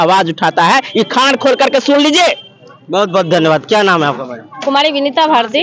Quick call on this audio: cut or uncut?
uncut